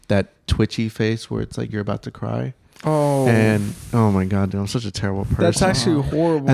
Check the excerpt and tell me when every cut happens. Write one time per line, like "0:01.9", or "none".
none

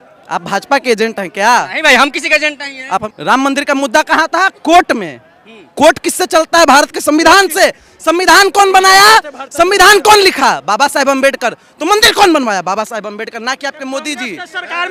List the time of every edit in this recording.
none

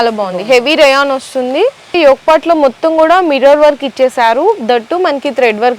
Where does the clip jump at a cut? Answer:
0:01.9

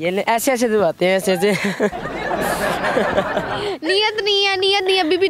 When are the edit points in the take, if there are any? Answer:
none

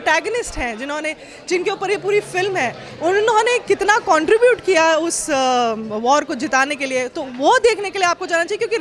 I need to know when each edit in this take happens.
none

